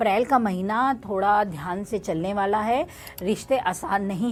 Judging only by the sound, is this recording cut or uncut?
uncut